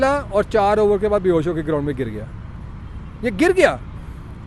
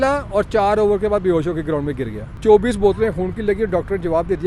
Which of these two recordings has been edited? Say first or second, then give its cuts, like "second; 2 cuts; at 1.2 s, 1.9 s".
second; 1 cut; at 2.4 s